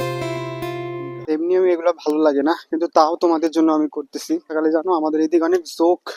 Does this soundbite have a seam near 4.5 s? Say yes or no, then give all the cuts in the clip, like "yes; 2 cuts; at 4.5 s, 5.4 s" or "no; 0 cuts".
yes; 2 cuts; at 1.0 s, 4.5 s